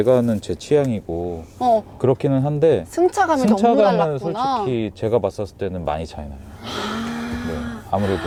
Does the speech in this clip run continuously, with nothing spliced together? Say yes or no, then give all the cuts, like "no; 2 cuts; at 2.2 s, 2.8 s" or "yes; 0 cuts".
yes; 0 cuts